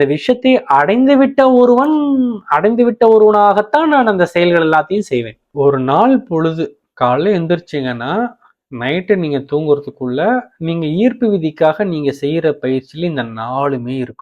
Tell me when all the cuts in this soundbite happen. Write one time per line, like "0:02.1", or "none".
0:05.4